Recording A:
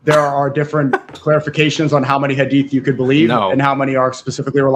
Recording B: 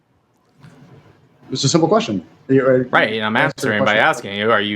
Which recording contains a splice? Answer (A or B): B